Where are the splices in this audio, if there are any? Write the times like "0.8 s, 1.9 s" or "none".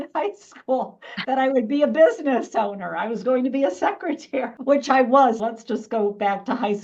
5.4 s

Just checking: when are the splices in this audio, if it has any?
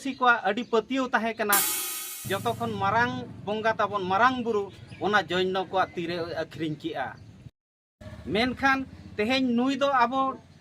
1.8 s, 7.9 s

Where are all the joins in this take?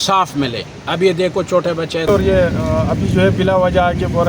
2.1 s

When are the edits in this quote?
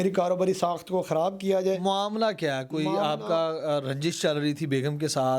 none

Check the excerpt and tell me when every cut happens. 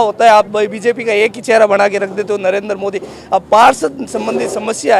none

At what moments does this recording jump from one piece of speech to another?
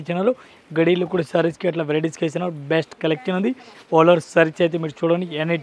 none

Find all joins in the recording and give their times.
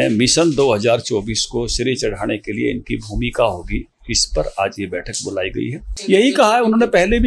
5.9 s

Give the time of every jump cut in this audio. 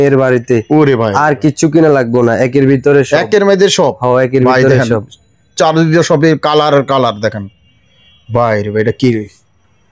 none

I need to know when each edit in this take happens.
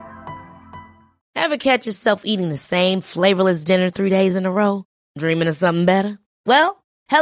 1.2 s

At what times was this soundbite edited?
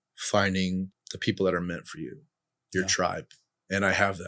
1.0 s

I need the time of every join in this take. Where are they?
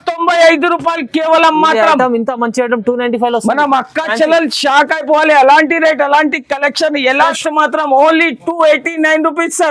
7.3 s

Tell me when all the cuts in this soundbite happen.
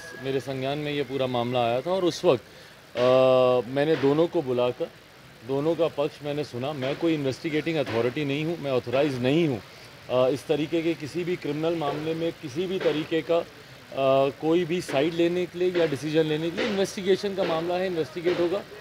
16.0 s, 17.3 s

